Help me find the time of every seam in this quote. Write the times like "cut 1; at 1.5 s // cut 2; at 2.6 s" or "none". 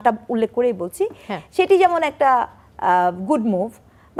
none